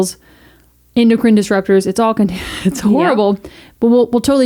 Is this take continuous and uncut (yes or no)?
yes